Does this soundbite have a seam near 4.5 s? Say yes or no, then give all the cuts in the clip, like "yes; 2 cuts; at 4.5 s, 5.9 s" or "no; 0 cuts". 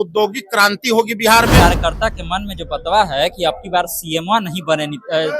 no; 1 cut; at 1.5 s